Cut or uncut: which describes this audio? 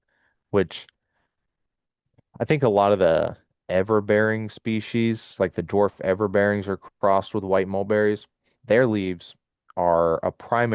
uncut